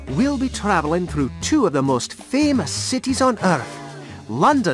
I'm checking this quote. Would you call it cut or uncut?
uncut